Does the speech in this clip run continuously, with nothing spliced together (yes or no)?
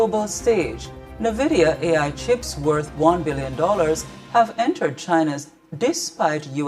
no